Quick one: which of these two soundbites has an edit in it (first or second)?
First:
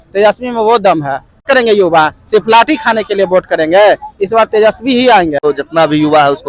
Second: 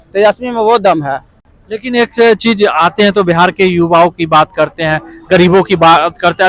first